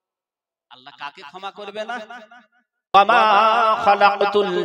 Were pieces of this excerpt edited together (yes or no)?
yes